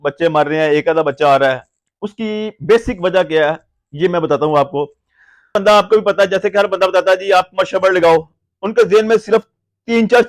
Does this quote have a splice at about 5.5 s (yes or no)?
yes